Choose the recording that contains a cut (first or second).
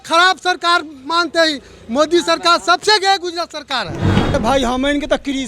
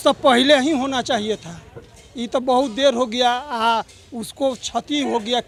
first